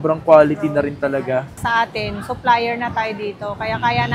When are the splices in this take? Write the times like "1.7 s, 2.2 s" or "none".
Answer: 1.5 s